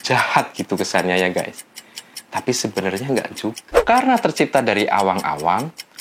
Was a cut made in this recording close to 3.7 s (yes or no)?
yes